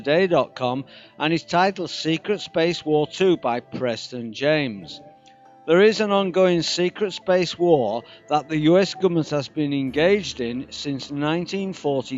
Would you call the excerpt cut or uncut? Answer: cut